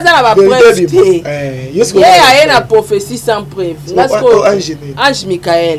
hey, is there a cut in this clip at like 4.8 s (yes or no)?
yes